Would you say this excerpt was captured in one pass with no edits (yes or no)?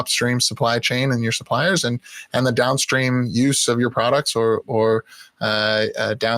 yes